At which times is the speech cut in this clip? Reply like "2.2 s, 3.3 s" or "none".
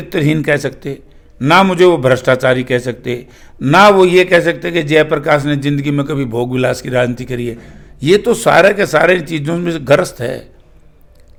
none